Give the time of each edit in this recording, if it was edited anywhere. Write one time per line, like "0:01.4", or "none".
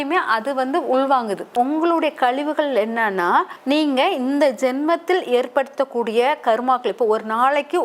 0:01.5
0:03.6